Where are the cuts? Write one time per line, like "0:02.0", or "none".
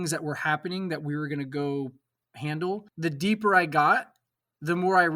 0:02.9